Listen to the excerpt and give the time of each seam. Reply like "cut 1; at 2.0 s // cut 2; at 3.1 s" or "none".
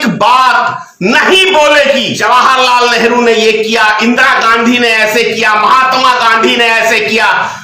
cut 1; at 2.1 s